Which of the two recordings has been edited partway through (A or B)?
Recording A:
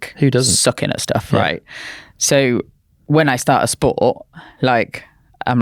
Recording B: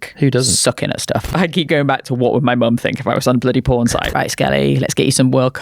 B